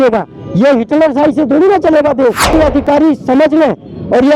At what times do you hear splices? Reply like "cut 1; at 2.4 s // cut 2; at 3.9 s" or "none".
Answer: cut 1; at 2.5 s